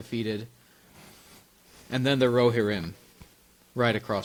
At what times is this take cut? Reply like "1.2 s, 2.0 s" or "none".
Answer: none